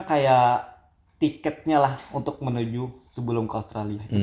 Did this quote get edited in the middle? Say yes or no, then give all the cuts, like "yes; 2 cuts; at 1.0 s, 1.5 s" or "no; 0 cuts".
no; 0 cuts